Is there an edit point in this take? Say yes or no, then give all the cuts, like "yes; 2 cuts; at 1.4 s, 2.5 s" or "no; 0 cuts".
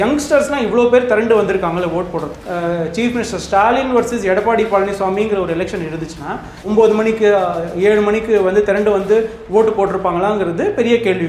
yes; 2 cuts; at 2.4 s, 6.6 s